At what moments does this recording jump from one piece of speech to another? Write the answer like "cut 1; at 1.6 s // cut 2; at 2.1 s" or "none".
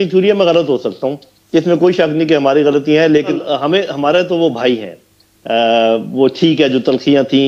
cut 1; at 3.4 s